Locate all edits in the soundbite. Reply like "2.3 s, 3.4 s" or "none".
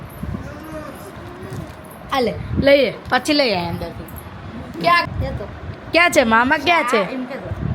5.1 s